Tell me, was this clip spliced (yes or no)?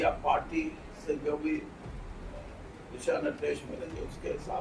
no